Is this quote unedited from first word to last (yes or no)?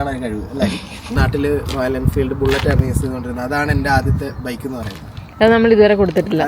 no